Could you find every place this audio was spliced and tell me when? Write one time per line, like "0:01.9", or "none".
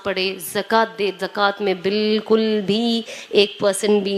none